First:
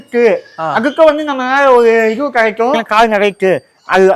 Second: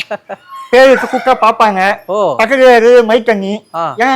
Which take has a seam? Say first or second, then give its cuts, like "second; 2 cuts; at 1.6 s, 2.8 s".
first; 1 cut; at 2.8 s